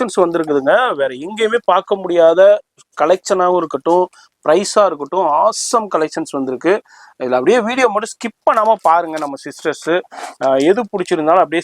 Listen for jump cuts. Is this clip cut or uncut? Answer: uncut